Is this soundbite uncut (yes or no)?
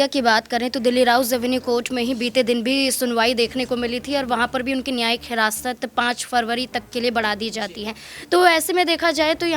yes